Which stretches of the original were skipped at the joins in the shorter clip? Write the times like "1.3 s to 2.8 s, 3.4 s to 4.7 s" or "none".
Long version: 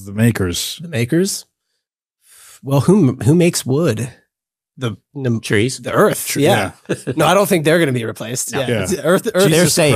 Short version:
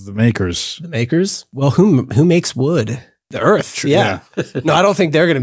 1.4 s to 2.5 s, 4.4 s to 5.8 s